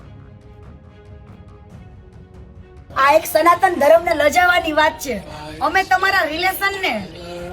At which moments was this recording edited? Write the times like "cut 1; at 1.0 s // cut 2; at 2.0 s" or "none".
cut 1; at 2.8 s